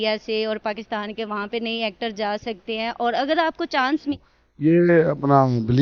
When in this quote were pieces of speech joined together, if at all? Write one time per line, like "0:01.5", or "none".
0:04.2